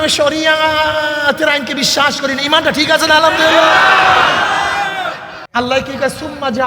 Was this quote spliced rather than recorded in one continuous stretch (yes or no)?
yes